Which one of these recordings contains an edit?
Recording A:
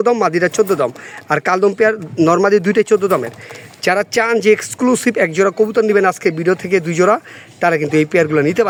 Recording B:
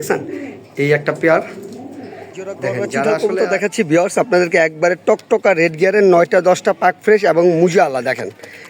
B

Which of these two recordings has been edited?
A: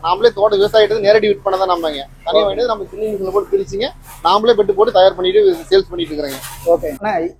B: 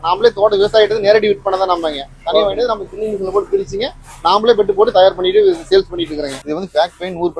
B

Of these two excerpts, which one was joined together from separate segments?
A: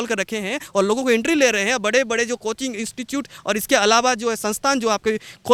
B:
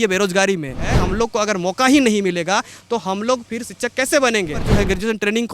B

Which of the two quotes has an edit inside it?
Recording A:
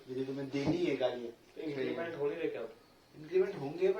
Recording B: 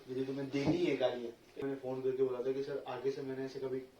B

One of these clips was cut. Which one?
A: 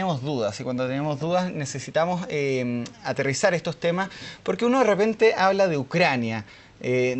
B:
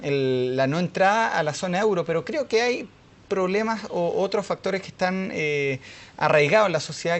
A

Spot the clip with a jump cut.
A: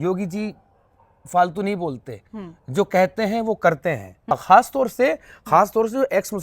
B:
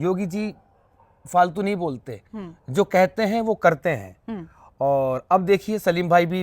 A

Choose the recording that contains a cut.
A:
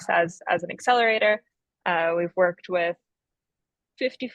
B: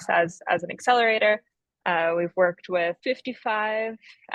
B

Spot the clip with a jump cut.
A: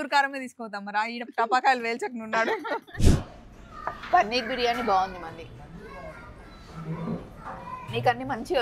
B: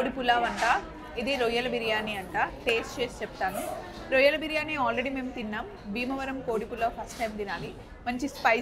A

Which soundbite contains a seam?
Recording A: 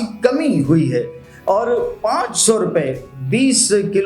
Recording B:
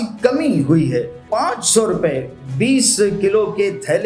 B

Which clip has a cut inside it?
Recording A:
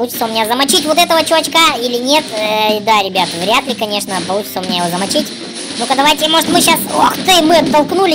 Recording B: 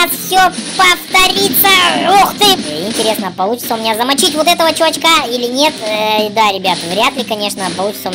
B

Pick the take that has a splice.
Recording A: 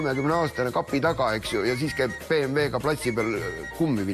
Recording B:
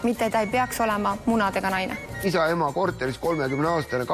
B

